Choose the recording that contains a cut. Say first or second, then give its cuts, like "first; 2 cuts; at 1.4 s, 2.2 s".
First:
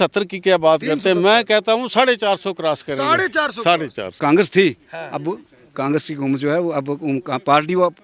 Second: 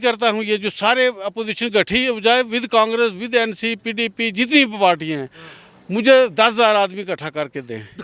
first; 1 cut; at 4.1 s